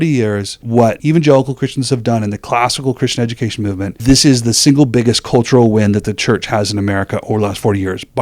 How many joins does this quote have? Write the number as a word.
two